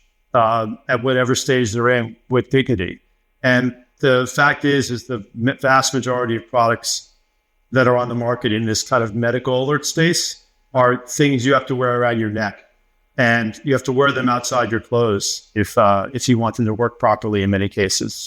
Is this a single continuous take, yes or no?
yes